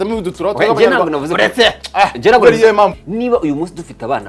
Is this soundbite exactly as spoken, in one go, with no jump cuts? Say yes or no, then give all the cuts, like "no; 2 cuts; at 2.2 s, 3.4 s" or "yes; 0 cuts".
no; 1 cut; at 3.0 s